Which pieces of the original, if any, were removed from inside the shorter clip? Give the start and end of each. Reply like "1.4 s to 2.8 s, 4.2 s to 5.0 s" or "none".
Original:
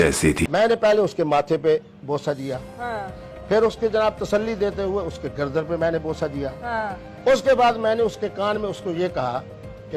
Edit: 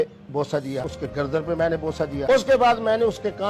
2.7 s to 5.2 s, 6.4 s to 7.2 s